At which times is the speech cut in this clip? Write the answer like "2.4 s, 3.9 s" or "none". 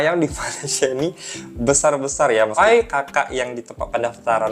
2.5 s